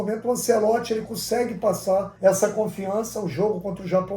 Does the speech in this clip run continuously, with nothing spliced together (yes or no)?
no